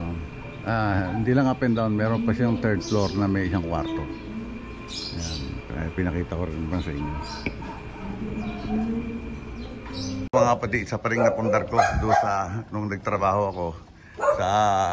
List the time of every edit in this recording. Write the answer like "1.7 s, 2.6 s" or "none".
10.2 s